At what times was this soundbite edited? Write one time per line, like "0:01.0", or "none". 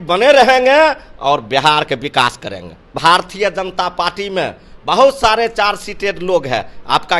0:03.0